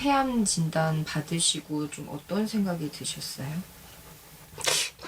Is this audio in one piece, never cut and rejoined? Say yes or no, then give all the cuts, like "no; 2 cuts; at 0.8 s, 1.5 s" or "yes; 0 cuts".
yes; 0 cuts